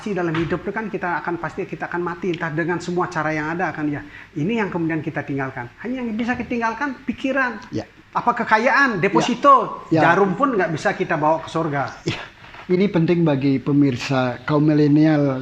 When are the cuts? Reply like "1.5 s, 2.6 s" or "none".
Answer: none